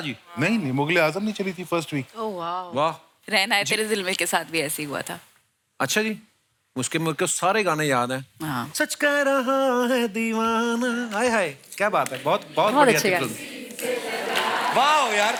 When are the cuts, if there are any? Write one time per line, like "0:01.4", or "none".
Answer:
none